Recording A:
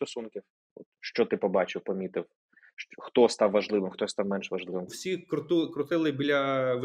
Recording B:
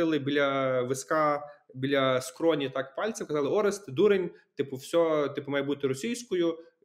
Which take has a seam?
A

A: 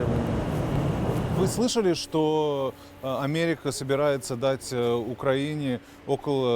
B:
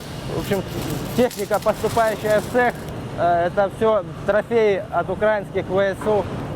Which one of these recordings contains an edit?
A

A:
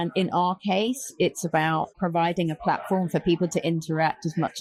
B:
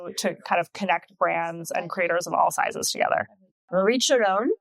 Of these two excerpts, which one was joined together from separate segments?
B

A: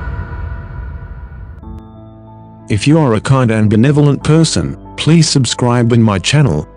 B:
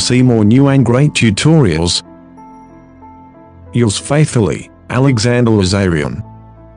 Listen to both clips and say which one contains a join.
A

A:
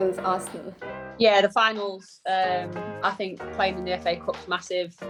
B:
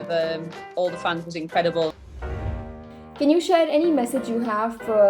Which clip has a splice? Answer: B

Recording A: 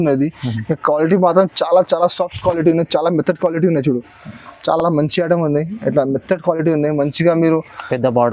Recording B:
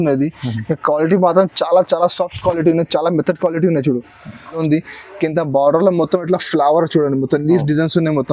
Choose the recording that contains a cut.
B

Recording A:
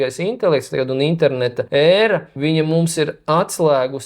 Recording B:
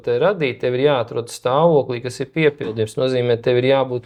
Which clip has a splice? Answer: A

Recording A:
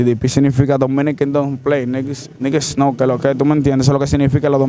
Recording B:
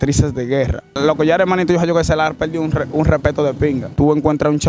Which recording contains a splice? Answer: B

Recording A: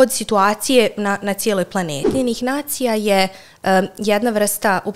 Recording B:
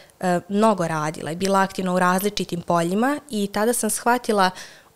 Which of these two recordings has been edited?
A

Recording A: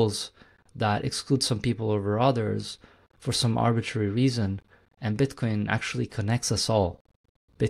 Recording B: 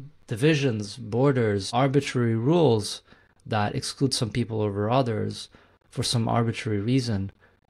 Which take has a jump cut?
B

